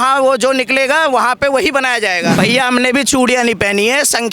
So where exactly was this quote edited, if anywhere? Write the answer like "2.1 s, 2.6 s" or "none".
2.4 s